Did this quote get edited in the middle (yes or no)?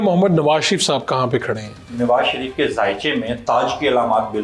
yes